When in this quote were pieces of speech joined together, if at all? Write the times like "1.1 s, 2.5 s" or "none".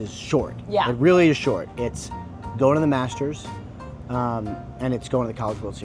none